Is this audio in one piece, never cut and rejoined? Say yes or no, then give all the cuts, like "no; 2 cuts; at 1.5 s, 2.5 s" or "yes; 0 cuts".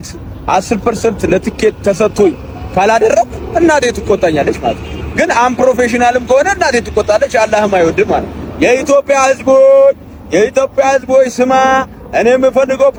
yes; 0 cuts